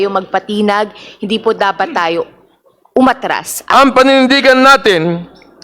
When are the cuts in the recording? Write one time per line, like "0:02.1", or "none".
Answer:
0:03.7